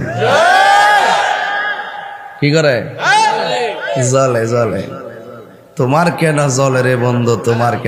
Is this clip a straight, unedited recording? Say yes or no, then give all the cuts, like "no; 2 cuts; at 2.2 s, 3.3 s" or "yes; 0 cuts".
yes; 0 cuts